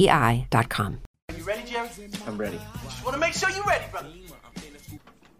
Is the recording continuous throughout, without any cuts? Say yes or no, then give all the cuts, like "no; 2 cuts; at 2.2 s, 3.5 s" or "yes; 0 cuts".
no; 1 cut; at 1.4 s